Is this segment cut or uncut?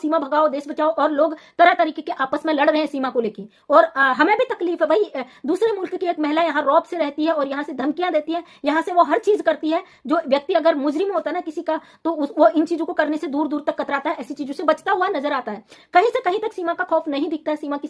uncut